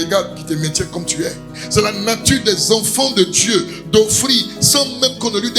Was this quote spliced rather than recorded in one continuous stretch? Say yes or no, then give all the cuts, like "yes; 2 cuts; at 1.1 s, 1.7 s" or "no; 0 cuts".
yes; 1 cut; at 1.6 s